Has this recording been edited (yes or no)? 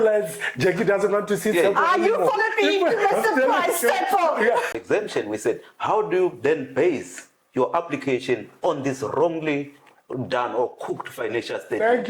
yes